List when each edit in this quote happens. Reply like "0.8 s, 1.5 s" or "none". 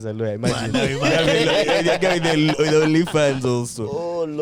none